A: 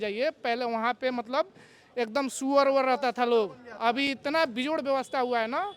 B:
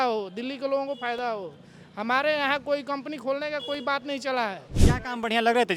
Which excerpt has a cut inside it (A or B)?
B